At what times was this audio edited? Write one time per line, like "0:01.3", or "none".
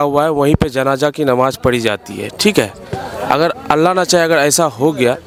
none